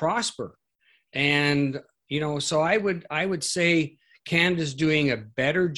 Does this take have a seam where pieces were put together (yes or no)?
no